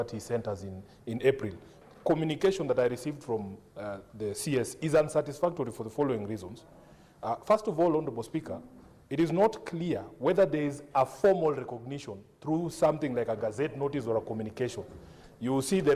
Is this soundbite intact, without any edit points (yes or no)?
no